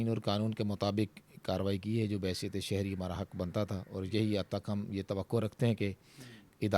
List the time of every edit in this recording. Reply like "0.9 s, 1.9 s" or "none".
none